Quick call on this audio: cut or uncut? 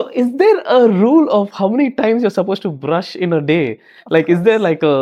uncut